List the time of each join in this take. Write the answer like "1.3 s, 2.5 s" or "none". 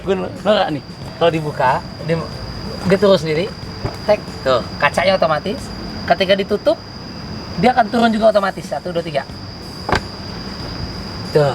none